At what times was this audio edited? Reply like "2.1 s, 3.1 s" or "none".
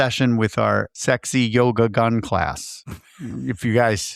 0.9 s